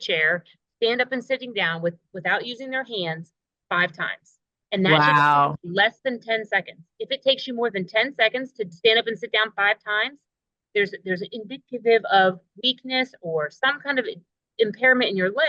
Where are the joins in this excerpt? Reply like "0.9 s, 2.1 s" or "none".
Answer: none